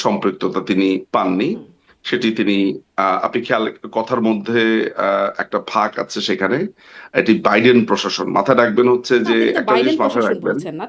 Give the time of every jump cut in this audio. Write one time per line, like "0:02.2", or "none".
none